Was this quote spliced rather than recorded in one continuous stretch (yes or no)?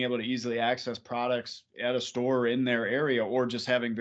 no